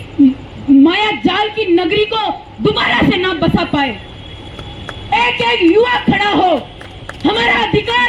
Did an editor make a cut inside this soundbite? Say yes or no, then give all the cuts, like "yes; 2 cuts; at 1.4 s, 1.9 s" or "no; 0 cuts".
no; 0 cuts